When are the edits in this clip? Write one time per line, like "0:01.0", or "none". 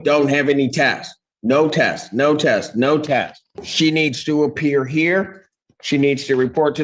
0:03.4